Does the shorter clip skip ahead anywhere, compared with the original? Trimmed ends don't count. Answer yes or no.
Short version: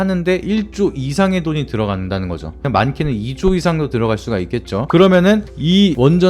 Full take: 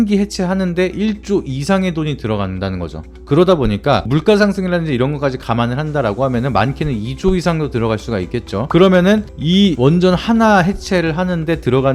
yes